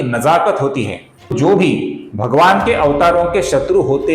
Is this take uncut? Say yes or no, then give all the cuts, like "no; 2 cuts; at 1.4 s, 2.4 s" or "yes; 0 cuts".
no; 1 cut; at 1.3 s